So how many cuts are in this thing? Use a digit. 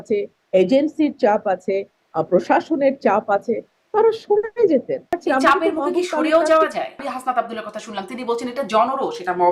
2